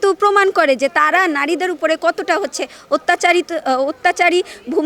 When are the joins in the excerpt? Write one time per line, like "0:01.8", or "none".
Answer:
none

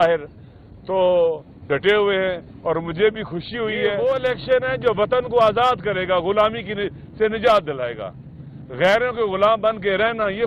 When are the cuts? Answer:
0:03.9

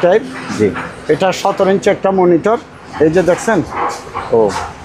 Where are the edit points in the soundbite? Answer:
none

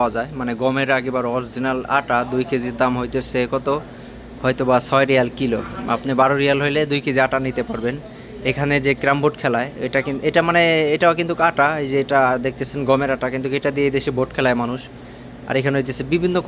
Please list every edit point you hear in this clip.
none

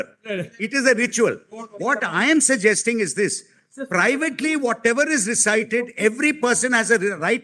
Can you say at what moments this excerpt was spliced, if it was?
none

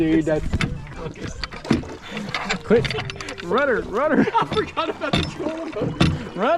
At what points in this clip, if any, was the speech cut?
none

